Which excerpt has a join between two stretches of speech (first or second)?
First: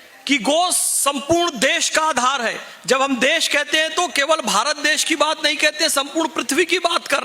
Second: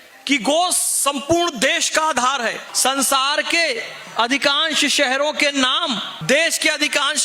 second